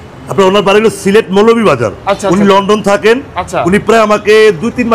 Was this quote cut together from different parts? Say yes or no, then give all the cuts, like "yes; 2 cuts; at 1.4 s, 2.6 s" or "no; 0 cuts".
no; 0 cuts